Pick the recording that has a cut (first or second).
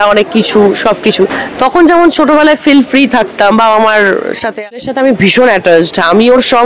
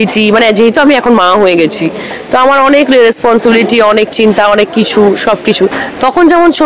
first